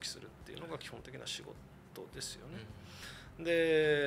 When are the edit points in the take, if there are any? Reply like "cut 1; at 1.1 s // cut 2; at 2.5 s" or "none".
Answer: none